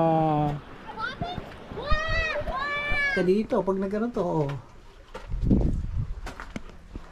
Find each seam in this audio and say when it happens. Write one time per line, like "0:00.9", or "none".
0:03.1